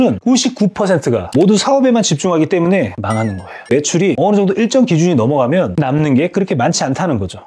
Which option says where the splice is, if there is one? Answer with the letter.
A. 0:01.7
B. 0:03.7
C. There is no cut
B